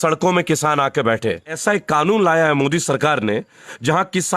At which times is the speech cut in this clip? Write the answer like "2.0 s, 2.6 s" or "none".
1.6 s